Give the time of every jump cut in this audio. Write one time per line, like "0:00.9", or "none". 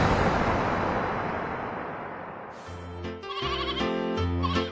0:02.8